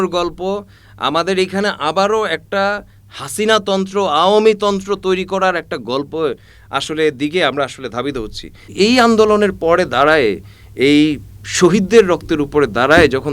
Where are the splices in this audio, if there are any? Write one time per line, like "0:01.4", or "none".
0:08.6